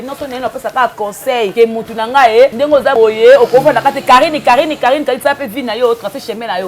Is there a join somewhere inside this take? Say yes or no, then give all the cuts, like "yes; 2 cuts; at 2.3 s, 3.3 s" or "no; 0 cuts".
yes; 2 cuts; at 1.5 s, 2.8 s